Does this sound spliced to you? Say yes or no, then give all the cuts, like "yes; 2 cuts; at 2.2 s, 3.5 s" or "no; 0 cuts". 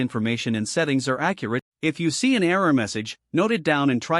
yes; 1 cut; at 1.6 s